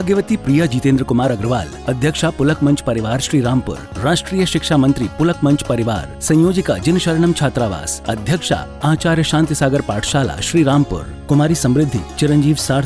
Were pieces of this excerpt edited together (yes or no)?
no